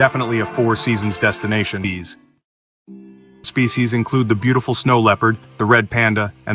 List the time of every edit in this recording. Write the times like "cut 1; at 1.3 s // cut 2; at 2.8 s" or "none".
cut 1; at 1.8 s // cut 2; at 3.5 s